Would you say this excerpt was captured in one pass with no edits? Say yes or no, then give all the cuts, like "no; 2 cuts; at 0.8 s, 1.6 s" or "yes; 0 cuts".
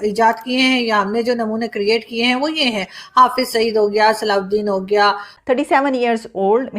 no; 1 cut; at 5.3 s